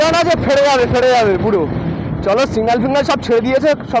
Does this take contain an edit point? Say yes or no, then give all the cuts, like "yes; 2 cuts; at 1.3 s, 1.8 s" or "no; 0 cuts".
no; 0 cuts